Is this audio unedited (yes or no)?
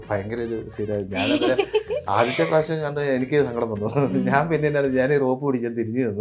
yes